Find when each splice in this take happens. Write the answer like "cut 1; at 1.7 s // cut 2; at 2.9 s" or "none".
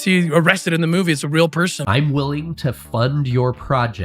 cut 1; at 1.8 s